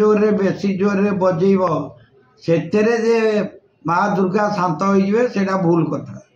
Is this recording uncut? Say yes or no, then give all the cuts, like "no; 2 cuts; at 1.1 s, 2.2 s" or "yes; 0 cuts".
yes; 0 cuts